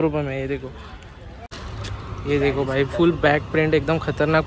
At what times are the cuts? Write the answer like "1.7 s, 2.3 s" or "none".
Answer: 1.4 s